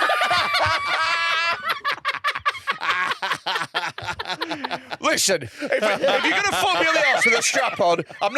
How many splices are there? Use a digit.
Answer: 0